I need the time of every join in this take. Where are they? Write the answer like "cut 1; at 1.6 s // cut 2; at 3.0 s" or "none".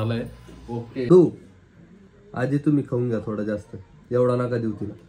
cut 1; at 1.1 s